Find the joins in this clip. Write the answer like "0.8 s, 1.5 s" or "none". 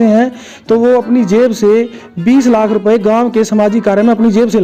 none